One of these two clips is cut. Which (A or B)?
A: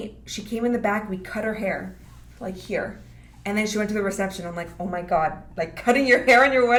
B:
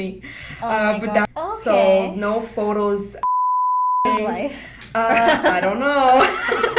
B